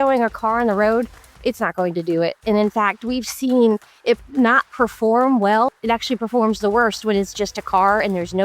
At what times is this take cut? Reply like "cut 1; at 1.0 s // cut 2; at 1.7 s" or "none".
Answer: cut 1; at 5.7 s